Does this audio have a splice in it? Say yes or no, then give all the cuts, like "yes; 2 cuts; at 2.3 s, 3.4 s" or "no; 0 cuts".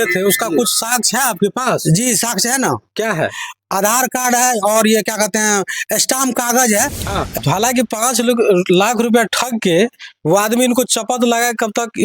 yes; 1 cut; at 7.4 s